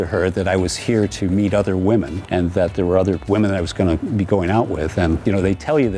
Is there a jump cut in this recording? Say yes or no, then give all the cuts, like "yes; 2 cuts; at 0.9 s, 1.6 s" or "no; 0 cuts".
yes; 2 cuts; at 2.2 s, 5.2 s